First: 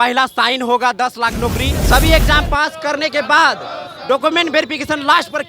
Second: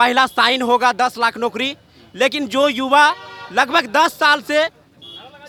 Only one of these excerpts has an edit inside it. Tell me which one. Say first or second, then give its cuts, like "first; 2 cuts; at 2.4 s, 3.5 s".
first; 1 cut; at 1.7 s